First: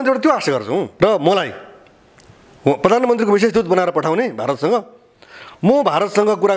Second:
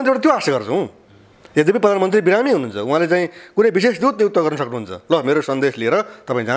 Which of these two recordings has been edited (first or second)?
first